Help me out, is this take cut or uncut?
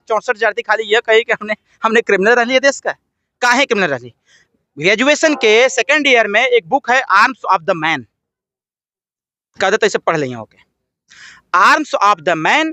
uncut